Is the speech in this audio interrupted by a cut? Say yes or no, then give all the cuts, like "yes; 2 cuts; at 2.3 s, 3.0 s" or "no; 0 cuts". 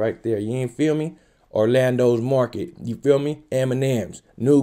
no; 0 cuts